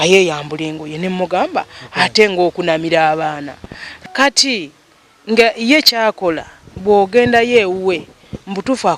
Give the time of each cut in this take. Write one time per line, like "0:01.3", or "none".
0:03.9